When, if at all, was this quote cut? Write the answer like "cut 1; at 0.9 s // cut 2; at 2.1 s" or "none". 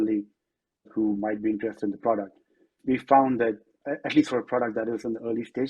cut 1; at 0.9 s // cut 2; at 2.8 s // cut 3; at 3.8 s